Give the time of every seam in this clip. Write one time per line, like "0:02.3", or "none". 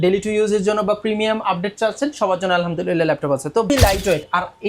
0:03.7